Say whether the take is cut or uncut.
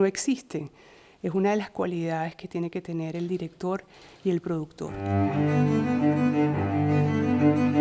cut